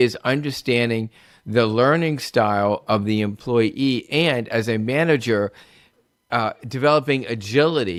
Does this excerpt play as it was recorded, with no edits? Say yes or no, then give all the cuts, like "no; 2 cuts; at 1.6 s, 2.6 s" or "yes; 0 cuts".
yes; 0 cuts